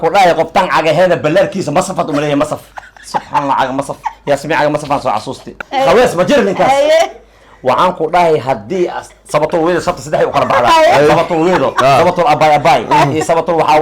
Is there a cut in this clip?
yes; 1 cut; at 5.6 s

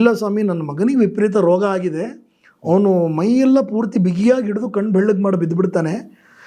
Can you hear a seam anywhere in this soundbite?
no; 0 cuts

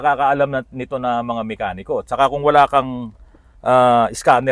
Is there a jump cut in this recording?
no; 0 cuts

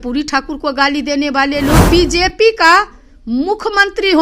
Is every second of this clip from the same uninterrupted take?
no; 1 cut; at 1.9 s

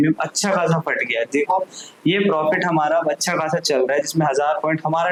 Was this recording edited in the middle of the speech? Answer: no; 0 cuts

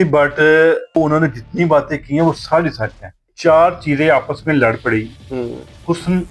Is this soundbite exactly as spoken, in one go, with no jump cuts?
no; 2 cuts; at 1.0 s, 3.3 s

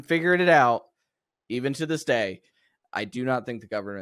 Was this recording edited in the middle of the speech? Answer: yes; 1 cut; at 2.5 s

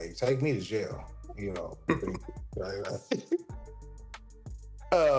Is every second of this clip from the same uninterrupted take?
yes; 0 cuts

